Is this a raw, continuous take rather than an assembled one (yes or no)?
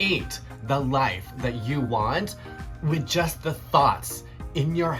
yes